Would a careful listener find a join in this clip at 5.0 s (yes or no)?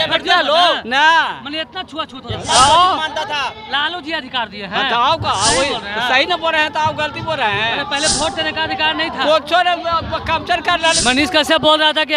no